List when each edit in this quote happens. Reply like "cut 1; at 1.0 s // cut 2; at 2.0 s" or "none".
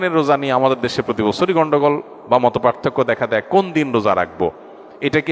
none